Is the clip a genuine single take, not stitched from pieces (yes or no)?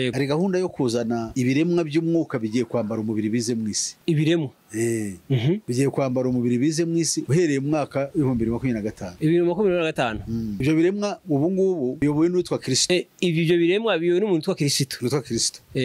yes